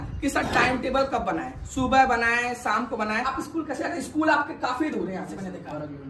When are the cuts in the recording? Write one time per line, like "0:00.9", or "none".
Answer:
0:03.4